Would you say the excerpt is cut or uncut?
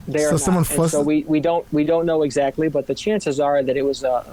uncut